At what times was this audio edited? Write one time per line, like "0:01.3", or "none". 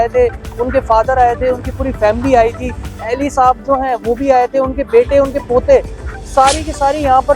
none